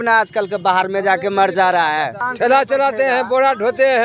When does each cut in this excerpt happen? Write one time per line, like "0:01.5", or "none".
0:02.2